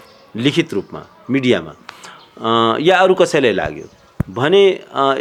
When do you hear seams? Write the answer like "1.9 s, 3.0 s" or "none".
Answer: none